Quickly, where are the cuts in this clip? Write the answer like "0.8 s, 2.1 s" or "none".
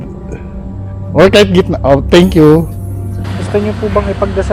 3.2 s